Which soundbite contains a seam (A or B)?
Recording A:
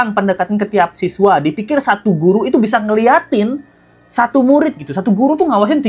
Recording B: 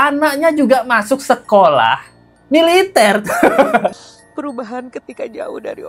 B